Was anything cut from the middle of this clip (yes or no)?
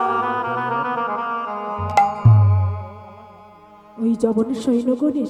no